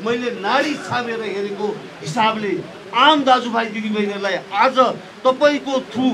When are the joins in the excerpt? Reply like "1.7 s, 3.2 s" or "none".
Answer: none